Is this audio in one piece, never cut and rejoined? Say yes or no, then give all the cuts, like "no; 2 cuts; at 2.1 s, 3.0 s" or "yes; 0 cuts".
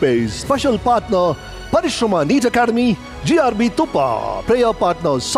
yes; 0 cuts